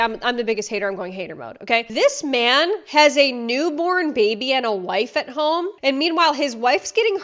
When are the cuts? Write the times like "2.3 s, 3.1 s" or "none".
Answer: none